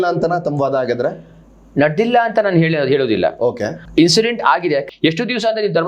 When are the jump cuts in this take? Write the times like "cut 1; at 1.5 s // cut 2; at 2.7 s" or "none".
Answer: cut 1; at 3.8 s // cut 2; at 4.9 s